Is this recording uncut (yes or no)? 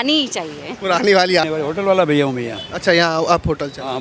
yes